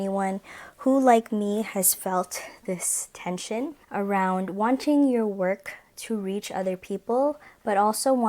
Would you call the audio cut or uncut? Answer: uncut